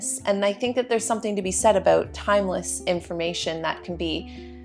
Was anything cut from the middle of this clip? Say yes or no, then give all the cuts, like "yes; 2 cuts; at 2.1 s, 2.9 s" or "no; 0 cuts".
no; 0 cuts